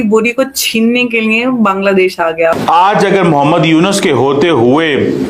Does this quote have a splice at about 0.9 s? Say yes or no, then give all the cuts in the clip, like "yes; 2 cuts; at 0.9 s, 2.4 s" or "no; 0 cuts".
no; 1 cut; at 2.6 s